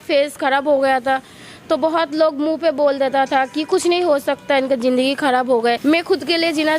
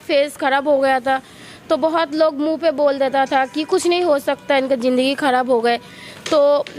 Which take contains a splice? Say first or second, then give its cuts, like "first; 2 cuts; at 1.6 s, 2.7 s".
first; 1 cut; at 5.8 s